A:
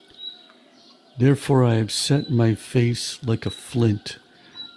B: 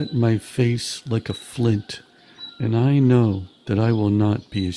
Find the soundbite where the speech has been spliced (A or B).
A